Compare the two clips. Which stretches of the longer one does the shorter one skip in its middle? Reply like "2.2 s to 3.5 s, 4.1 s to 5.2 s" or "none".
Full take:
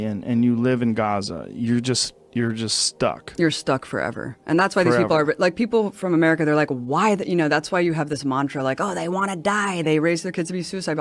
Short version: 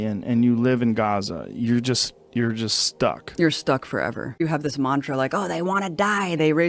4.4 s to 7.9 s